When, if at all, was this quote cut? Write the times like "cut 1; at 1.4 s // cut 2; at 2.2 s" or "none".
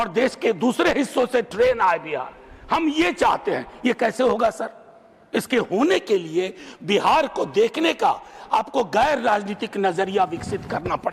none

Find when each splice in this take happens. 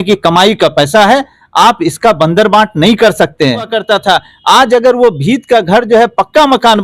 cut 1; at 3.8 s

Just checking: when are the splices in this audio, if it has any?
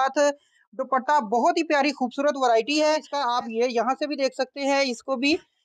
cut 1; at 3.1 s

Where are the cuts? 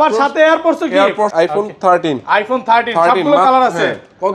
cut 1; at 1.3 s

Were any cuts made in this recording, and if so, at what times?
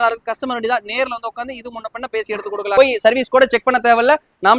cut 1; at 2.7 s

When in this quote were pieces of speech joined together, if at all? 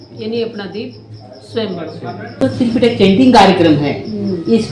cut 1; at 2.4 s

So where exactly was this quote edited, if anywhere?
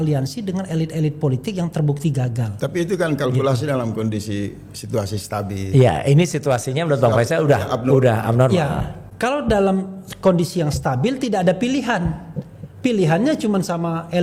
none

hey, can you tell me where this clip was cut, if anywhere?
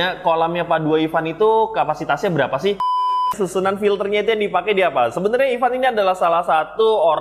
cut 1; at 2.9 s

